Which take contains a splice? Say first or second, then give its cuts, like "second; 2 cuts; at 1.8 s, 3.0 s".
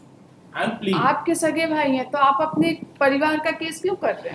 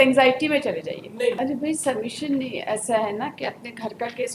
second; 1 cut; at 1.4 s